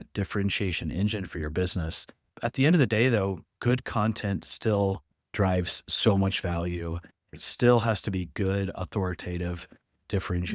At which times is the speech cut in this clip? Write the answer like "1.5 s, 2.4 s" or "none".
2.3 s, 7.3 s